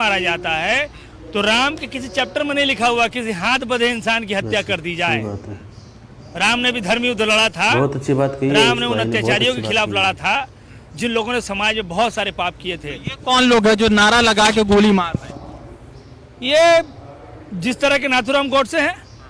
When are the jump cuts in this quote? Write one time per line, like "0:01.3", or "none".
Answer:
none